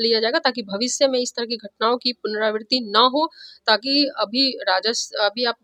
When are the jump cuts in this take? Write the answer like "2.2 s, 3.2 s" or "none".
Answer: none